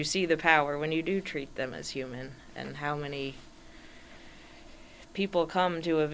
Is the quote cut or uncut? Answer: uncut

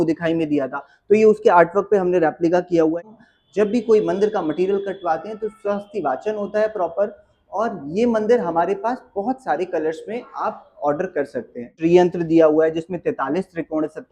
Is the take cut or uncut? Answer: cut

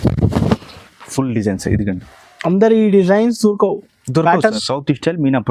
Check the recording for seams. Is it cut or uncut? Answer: cut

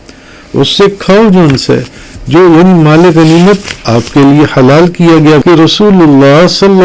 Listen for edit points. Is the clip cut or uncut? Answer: cut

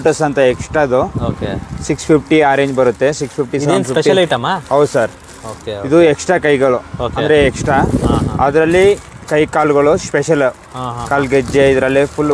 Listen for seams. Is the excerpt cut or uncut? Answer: uncut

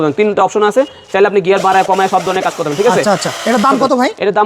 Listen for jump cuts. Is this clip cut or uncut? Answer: uncut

